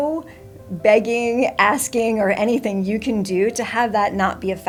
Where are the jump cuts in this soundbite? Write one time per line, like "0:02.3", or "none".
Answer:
none